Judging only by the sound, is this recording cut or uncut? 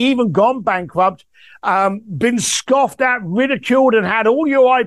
uncut